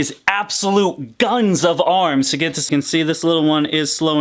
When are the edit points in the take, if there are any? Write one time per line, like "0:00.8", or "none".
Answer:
0:02.7